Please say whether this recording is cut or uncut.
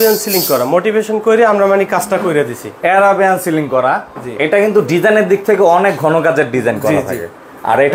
uncut